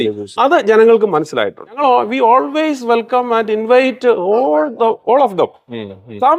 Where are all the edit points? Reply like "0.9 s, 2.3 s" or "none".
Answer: 1.8 s